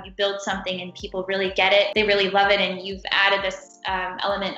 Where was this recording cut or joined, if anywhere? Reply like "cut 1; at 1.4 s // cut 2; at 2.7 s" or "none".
cut 1; at 1.9 s // cut 2; at 3.0 s

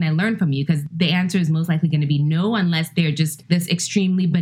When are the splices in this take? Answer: cut 1; at 0.9 s // cut 2; at 3.4 s

